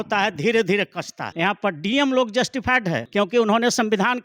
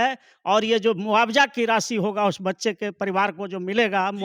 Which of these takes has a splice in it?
first; 2 cuts; at 1.2 s, 3.0 s

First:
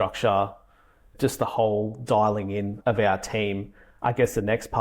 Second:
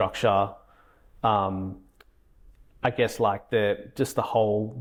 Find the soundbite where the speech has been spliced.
first; 3 cuts; at 1.1 s, 2.7 s, 3.8 s

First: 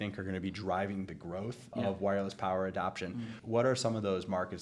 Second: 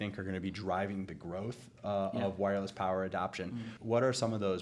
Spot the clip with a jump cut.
first; 1 cut; at 1.7 s

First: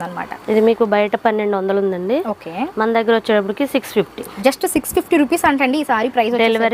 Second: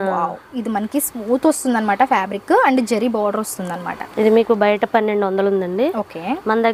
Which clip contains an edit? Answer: first; 1 cut; at 4.3 s

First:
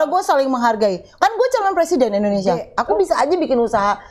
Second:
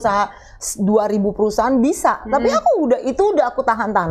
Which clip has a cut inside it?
first; 1 cut; at 2.7 s

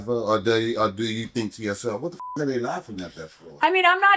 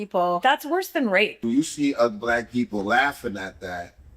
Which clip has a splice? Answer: second; 1 cut; at 1.4 s

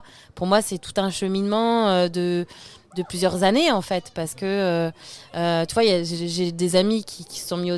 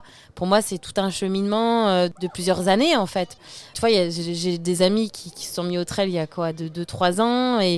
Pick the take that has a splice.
second; 2 cuts; at 2.1 s, 3.7 s

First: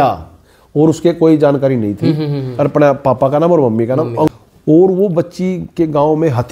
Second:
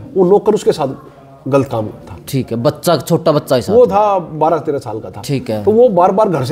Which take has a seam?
first; 1 cut; at 4.3 s

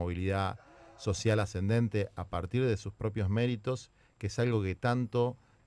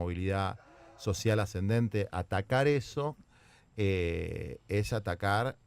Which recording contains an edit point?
second; 1 cut; at 2.1 s

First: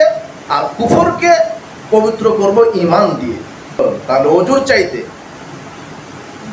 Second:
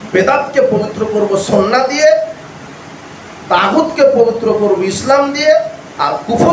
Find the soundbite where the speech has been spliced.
first; 1 cut; at 3.8 s

